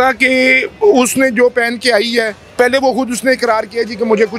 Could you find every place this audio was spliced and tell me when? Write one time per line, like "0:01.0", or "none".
0:02.4